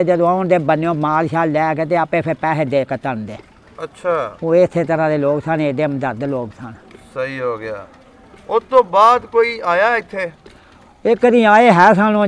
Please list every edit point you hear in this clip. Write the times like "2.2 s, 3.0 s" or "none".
none